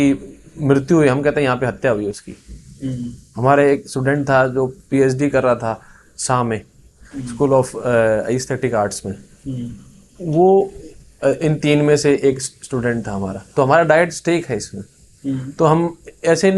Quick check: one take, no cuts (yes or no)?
yes